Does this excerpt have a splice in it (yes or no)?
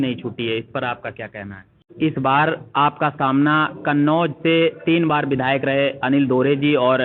yes